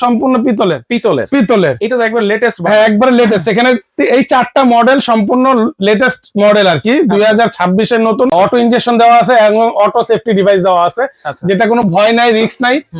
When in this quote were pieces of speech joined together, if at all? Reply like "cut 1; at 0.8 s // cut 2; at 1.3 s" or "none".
cut 1; at 8.3 s